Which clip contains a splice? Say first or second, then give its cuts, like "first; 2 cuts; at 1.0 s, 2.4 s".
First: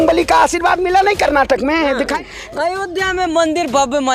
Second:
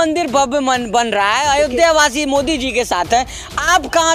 first; 1 cut; at 2.1 s